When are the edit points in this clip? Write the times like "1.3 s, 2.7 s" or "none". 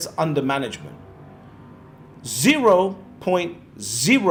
none